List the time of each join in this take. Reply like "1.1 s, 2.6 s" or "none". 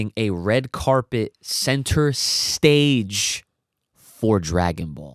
none